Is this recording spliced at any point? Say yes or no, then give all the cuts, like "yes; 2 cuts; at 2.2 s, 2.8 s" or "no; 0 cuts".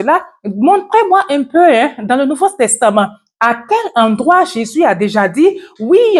no; 0 cuts